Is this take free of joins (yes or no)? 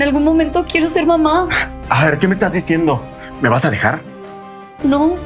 yes